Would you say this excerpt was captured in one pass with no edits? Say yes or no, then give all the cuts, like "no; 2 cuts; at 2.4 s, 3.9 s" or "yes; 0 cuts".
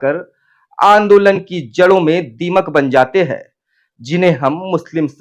yes; 0 cuts